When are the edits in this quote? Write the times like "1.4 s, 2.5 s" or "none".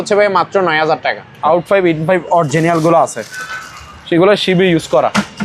1.3 s